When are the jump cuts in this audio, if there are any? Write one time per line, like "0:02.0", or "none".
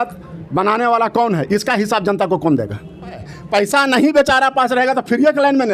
0:03.3